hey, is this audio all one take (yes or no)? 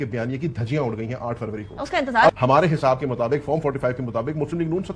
no